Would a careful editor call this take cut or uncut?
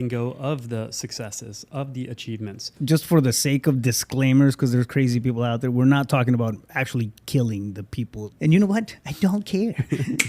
cut